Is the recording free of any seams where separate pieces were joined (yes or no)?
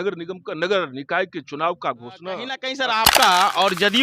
no